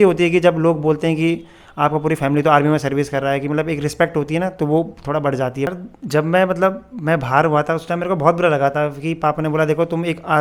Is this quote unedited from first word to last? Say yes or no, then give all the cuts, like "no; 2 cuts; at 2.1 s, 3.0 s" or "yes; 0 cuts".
no; 1 cut; at 5.7 s